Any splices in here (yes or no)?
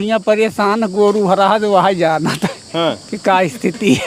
no